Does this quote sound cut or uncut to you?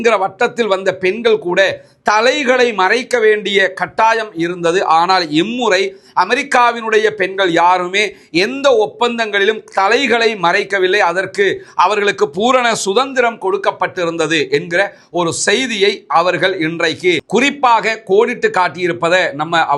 uncut